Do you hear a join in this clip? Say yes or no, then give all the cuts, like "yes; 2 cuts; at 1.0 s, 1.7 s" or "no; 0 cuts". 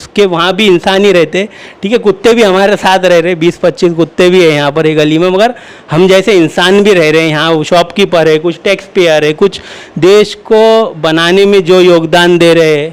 no; 0 cuts